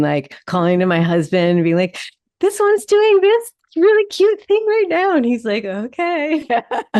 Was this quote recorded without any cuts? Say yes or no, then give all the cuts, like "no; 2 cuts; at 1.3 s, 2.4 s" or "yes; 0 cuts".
yes; 0 cuts